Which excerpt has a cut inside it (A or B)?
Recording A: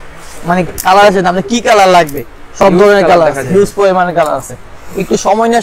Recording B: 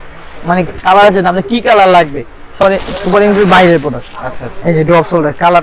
B